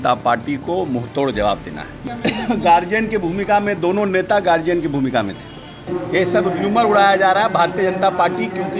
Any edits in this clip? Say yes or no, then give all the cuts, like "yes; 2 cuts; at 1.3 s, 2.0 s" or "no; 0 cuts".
yes; 2 cuts; at 2.0 s, 5.8 s